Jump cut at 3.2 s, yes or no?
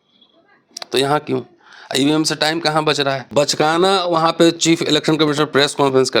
yes